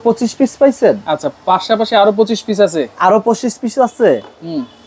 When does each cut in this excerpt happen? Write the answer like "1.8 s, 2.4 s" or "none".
none

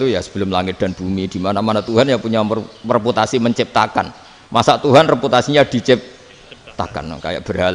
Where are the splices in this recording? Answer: none

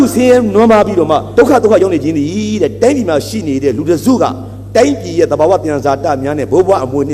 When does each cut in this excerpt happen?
1.3 s

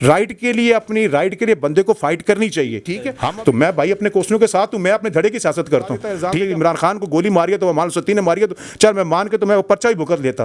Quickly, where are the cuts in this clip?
3.1 s, 6.1 s

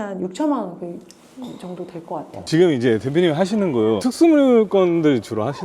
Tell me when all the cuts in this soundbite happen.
2.4 s

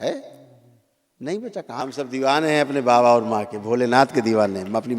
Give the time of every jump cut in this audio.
1.8 s

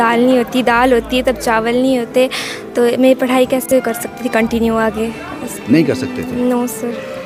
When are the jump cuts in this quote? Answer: none

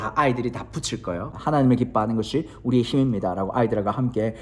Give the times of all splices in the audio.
1.3 s

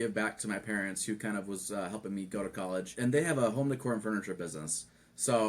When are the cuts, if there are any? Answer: 2.9 s

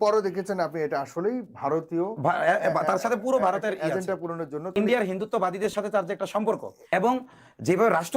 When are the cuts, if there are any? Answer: 4.7 s, 6.9 s

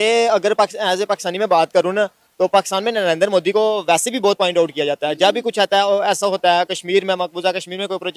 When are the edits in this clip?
none

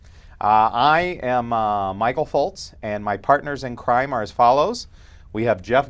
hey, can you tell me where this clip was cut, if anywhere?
4.3 s

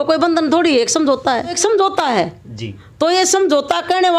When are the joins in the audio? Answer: 1.6 s

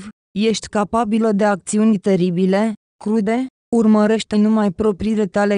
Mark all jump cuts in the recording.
3.3 s

